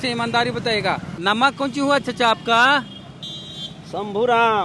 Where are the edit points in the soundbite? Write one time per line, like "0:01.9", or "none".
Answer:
0:01.1